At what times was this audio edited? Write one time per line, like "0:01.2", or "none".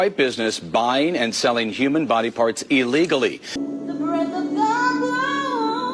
0:03.5